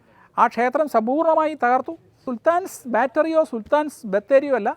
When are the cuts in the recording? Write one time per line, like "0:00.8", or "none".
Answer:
0:02.3